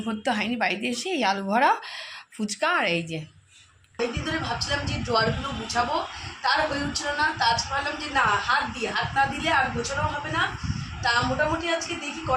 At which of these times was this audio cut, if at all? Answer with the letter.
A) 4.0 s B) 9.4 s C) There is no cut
A